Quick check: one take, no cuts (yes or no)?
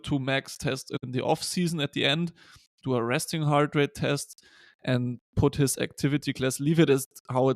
no